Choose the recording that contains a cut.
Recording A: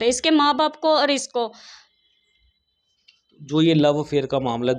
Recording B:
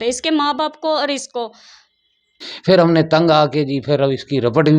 B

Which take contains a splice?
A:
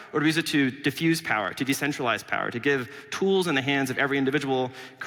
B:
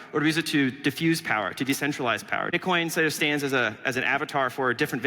B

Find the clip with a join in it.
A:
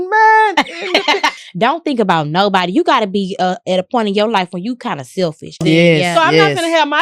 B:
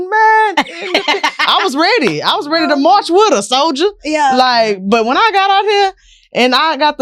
A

